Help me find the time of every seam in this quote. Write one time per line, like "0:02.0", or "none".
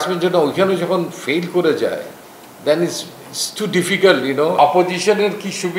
0:04.6